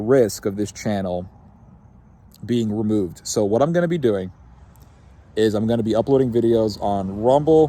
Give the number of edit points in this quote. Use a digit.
0